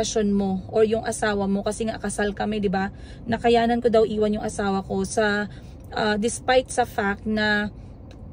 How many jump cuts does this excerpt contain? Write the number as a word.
zero